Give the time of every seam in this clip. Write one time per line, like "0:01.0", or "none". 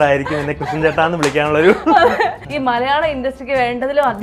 0:02.4